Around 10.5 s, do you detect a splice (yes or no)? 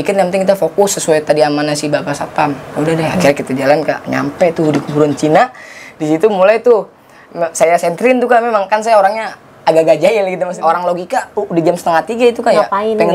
yes